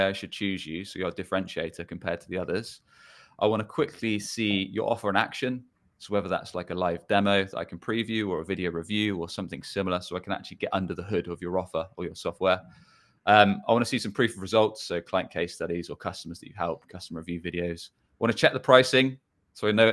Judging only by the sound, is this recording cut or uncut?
uncut